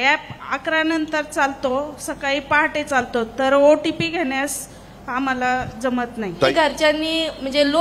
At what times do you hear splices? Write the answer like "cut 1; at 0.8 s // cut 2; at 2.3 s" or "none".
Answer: cut 1; at 6.5 s